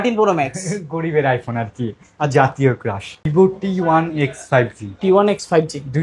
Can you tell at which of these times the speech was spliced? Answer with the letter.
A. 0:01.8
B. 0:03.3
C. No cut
B